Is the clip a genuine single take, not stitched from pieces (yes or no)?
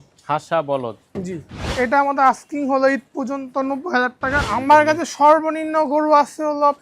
no